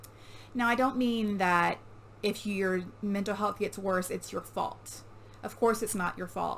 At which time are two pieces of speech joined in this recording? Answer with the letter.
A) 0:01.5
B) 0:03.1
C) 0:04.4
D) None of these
D